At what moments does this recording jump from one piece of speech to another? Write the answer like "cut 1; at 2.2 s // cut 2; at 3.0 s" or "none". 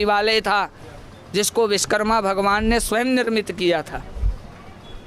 none